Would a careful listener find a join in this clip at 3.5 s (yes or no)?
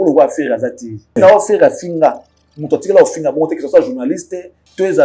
no